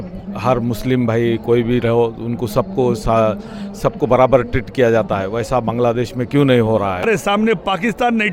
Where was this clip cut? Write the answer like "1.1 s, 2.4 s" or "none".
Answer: 7.0 s